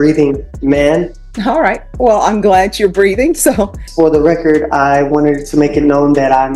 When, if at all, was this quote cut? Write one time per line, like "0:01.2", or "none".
0:01.2
0:03.8